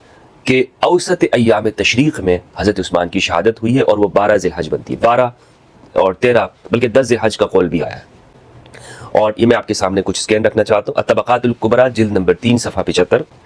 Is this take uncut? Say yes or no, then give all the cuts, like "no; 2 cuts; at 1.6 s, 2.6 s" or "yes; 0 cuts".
yes; 0 cuts